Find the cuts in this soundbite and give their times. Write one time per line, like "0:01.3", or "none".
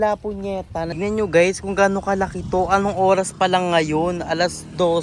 0:00.9